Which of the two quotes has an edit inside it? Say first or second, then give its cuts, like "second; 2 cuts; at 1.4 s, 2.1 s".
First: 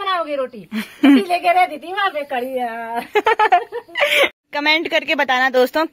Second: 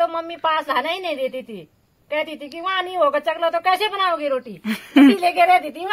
first; 1 cut; at 4.4 s